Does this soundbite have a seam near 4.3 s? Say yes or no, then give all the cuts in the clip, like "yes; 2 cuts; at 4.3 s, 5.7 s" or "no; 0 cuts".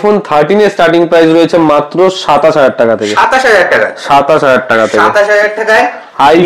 no; 0 cuts